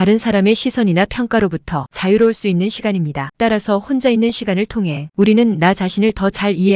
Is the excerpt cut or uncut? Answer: cut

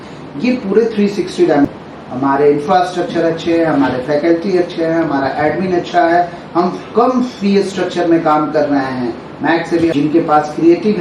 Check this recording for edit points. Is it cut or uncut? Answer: cut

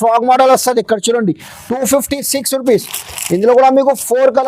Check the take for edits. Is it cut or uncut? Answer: uncut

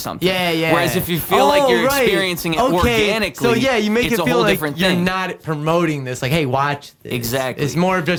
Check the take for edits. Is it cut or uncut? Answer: uncut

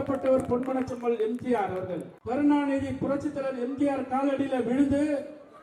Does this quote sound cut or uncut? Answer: cut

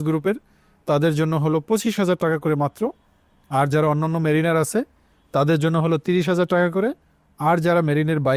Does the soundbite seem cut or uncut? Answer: uncut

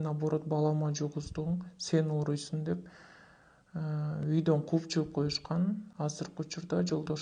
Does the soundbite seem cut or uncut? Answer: uncut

